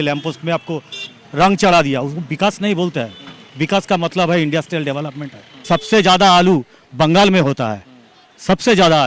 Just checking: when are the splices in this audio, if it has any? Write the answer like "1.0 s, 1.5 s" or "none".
5.7 s